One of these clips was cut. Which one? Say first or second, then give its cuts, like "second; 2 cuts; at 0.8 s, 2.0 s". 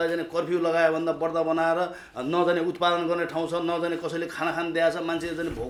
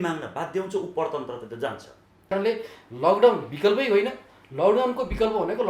second; 1 cut; at 2.3 s